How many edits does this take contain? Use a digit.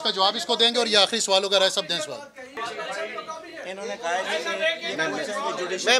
1